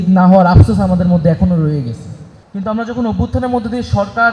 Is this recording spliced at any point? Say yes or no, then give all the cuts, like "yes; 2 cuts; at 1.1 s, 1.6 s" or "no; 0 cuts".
no; 0 cuts